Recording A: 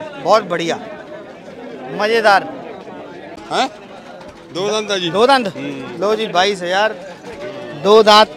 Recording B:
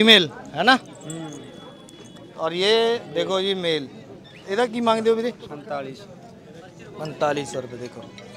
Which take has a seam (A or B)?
A